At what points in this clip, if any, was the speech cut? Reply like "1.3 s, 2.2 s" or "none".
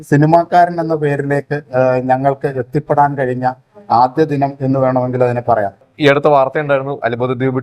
5.9 s